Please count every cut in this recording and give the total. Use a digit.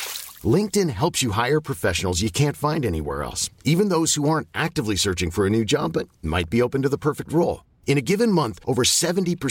0